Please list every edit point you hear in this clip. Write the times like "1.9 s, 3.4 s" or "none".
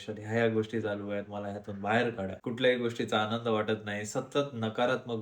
2.4 s